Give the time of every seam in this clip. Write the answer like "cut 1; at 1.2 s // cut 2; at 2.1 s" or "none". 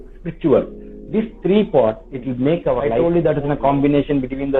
cut 1; at 3.0 s